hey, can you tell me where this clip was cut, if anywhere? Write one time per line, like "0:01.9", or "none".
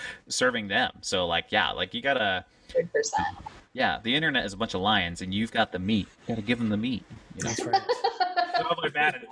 none